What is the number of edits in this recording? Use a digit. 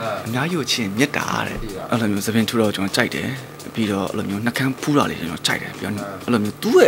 1